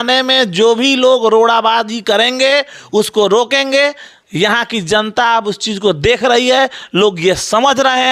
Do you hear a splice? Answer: no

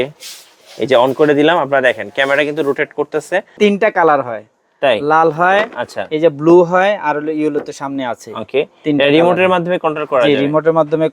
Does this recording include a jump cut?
yes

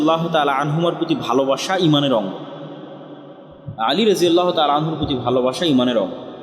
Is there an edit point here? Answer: no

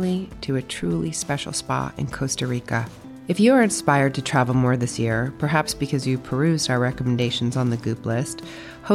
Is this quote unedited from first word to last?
yes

